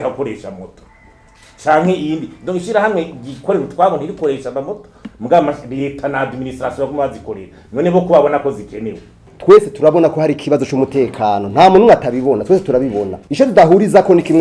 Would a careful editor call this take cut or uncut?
cut